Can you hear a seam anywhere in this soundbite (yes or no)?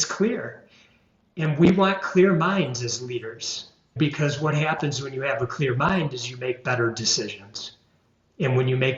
yes